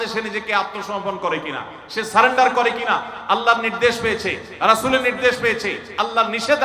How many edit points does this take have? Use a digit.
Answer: 0